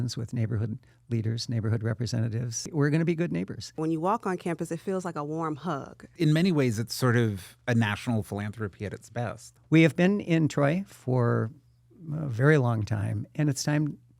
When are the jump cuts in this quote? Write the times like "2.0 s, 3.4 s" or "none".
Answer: 2.7 s, 3.8 s, 6.1 s, 9.5 s

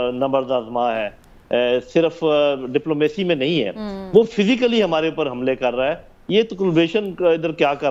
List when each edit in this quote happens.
none

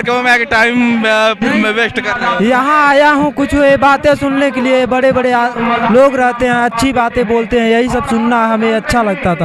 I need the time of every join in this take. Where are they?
none

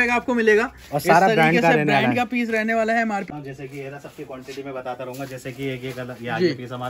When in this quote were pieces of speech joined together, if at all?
3.3 s

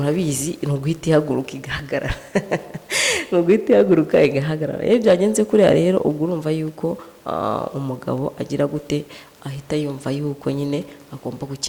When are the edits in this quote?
none

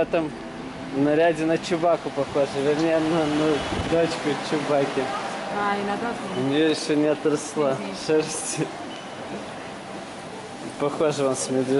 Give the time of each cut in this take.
none

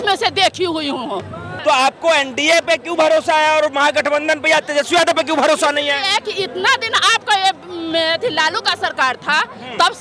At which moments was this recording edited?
1.5 s

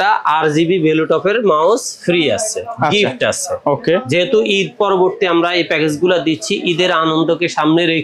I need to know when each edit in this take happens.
none

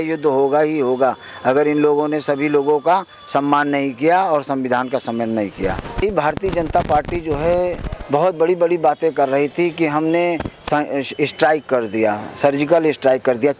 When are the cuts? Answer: 6.0 s

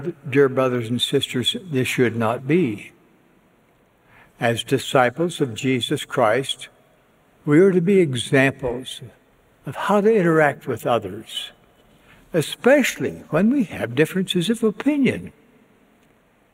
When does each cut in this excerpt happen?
none

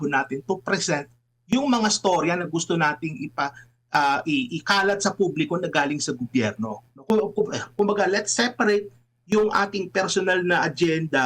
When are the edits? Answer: none

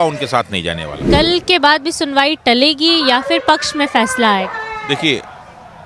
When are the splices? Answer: 1.1 s

